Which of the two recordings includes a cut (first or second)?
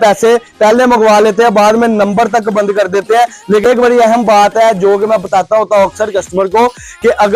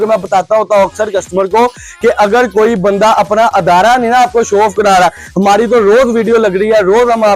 first